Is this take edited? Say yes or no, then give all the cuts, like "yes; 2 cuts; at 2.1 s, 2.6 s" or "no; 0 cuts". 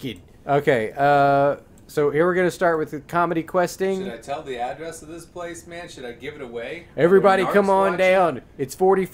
yes; 1 cut; at 5.0 s